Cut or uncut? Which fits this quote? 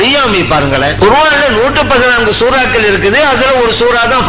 cut